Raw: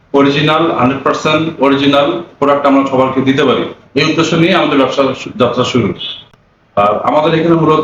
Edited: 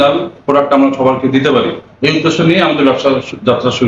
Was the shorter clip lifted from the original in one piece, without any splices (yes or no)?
yes